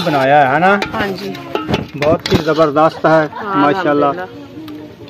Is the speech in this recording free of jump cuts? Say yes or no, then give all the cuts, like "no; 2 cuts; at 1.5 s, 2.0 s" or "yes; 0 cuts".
yes; 0 cuts